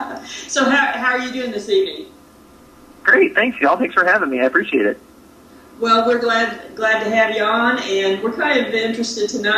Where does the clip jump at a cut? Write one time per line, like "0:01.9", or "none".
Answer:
0:04.0